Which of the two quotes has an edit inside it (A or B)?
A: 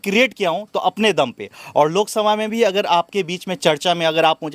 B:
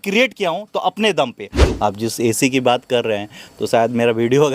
B